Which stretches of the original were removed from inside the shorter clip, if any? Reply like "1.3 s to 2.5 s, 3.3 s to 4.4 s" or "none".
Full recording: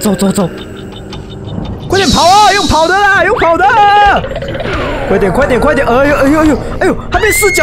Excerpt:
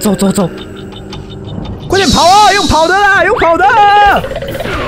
none